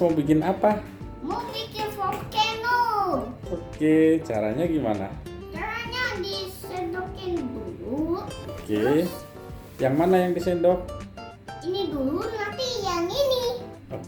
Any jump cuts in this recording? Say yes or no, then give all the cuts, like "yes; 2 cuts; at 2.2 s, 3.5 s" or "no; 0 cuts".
no; 0 cuts